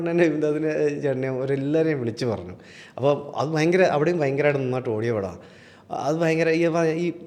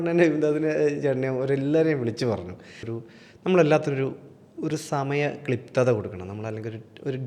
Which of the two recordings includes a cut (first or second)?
second